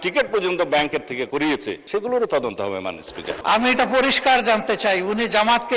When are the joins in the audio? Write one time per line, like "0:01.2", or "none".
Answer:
0:01.3
0:03.4